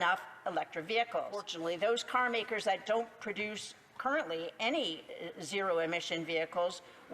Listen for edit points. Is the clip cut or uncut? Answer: cut